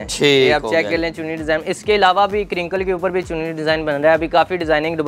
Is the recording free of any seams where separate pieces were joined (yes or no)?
yes